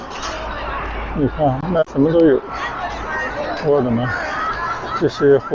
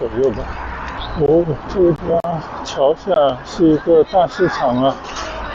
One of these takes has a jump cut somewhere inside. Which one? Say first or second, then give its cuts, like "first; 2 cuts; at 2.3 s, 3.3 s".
second; 1 cut; at 0.9 s